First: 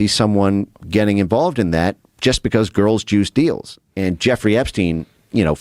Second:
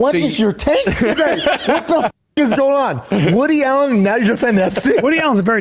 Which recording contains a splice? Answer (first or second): first